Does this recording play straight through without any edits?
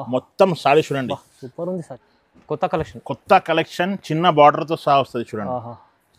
no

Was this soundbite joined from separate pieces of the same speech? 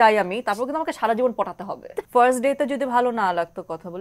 yes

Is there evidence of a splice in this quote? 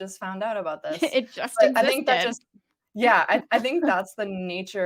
no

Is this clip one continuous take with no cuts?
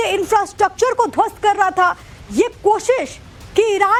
yes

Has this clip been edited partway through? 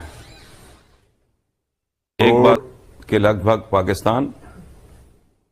yes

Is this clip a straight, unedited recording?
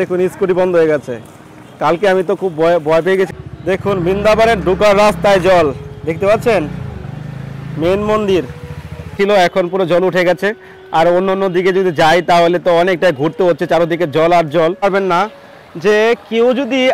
no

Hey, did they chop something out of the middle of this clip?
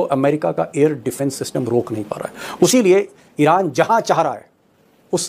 yes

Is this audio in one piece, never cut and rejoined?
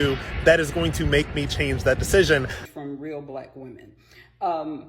no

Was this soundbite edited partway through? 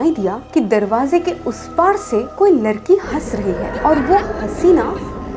no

